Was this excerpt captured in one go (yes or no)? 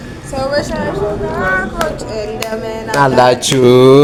yes